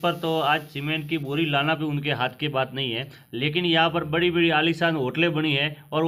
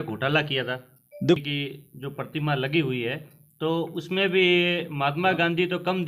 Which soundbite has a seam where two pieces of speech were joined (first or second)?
second